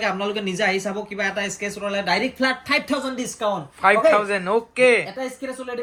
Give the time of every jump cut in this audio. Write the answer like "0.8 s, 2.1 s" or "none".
none